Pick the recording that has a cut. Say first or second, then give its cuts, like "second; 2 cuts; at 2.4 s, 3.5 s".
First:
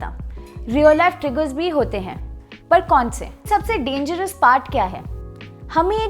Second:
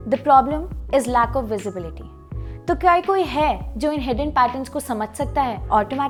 first; 1 cut; at 3.5 s